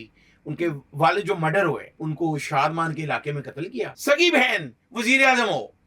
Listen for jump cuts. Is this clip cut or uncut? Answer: cut